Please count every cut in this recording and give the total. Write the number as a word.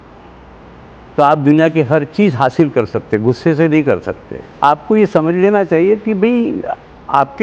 one